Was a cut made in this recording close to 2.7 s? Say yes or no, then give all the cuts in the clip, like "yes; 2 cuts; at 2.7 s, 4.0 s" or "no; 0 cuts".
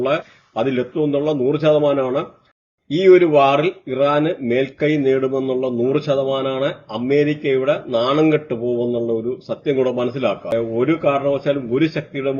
yes; 2 cuts; at 2.7 s, 10.5 s